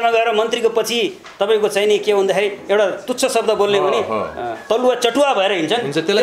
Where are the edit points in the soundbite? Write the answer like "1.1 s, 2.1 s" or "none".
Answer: none